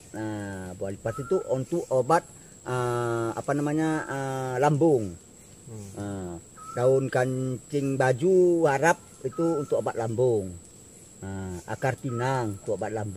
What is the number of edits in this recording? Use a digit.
0